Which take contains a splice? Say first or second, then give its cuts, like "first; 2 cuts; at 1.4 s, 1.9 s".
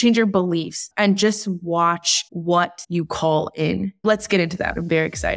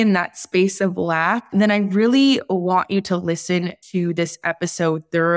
first; 1 cut; at 4.0 s